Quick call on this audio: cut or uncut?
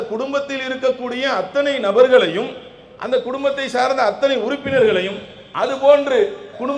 uncut